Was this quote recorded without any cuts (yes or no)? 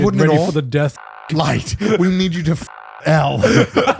no